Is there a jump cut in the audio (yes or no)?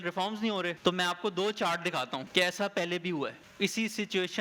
yes